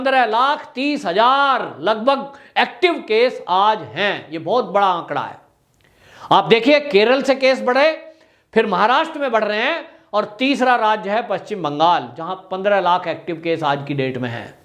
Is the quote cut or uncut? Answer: uncut